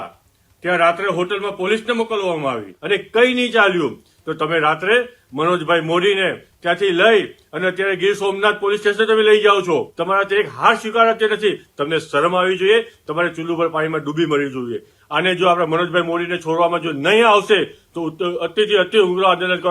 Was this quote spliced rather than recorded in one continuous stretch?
yes; 3 cuts; at 2.7 s, 9.9 s, 15.0 s

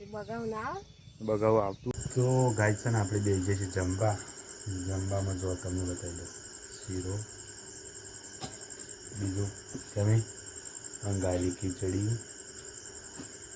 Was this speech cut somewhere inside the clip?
yes; 1 cut; at 1.8 s

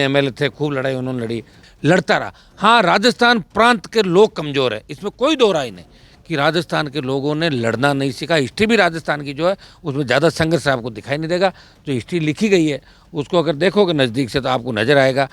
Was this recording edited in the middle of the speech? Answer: yes; 1 cut; at 1.6 s

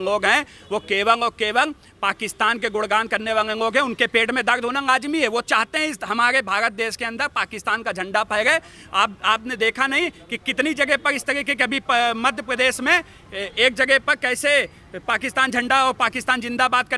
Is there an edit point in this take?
no; 0 cuts

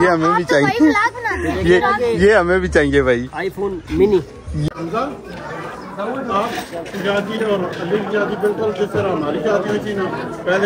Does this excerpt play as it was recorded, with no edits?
no; 1 cut; at 4.6 s

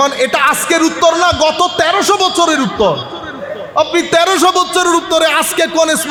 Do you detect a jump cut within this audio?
no; 0 cuts

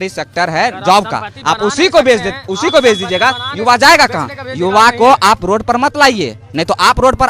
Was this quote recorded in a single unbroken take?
yes; 0 cuts

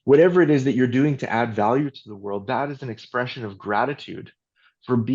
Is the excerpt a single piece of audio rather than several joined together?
yes; 0 cuts

